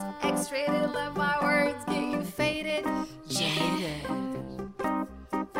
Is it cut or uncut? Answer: uncut